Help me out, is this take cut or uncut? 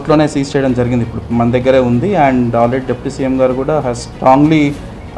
uncut